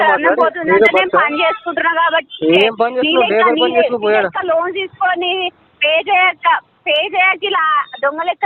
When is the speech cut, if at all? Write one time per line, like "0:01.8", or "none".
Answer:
none